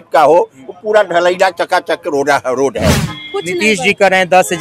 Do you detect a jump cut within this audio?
yes; 1 cut; at 3.1 s

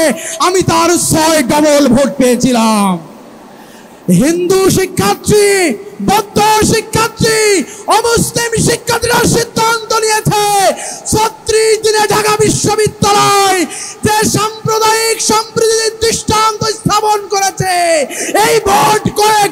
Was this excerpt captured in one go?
yes; 0 cuts

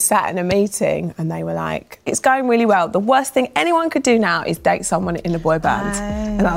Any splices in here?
yes; 1 cut; at 2.1 s

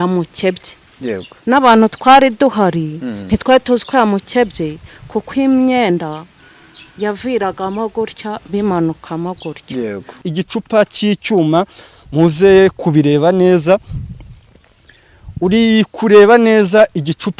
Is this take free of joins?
no; 1 cut; at 10.2 s

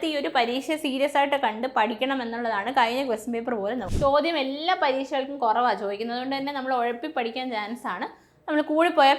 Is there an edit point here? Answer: yes; 1 cut; at 3.8 s

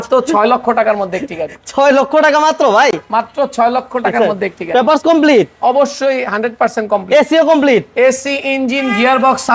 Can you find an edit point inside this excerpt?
no; 0 cuts

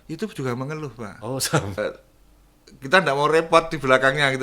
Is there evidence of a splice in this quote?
yes; 1 cut; at 1.8 s

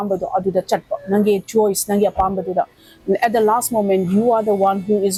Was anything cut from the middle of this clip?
no; 0 cuts

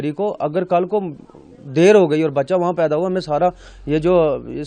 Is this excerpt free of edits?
yes; 0 cuts

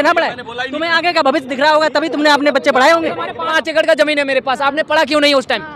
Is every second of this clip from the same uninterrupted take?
yes; 0 cuts

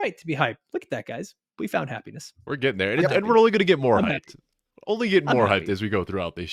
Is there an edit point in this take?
no; 0 cuts

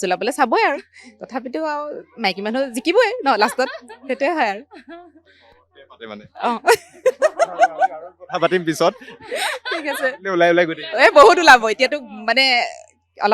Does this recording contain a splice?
no; 0 cuts

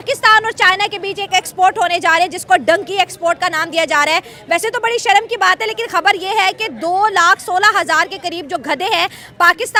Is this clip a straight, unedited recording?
yes; 0 cuts

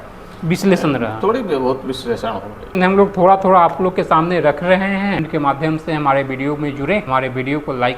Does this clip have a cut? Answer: yes; 3 cuts; at 2.7 s, 5.3 s, 7.1 s

